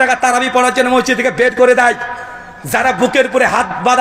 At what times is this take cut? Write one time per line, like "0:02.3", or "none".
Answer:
none